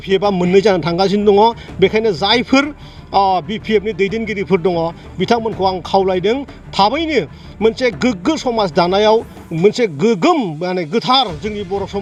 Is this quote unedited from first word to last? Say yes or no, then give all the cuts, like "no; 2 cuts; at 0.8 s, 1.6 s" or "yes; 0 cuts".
yes; 0 cuts